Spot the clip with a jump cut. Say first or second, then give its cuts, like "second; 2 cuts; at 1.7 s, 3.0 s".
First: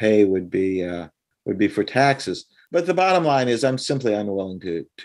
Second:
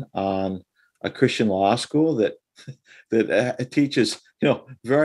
first; 1 cut; at 2.5 s